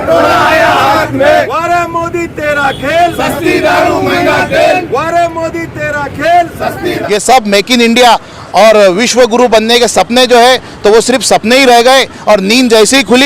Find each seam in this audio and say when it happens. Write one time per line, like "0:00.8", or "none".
0:01.5
0:06.9